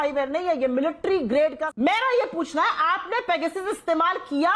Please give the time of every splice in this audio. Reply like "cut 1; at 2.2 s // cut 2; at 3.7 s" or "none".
cut 1; at 1.6 s